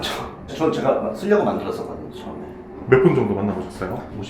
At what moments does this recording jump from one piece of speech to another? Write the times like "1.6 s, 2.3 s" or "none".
none